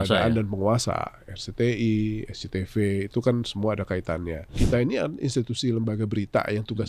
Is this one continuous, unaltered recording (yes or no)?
no